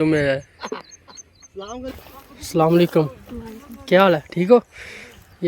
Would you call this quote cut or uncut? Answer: cut